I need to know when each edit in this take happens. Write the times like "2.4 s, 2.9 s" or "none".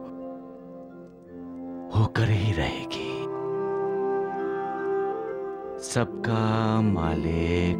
none